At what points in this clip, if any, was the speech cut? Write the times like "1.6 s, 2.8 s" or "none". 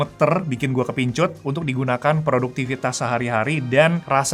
none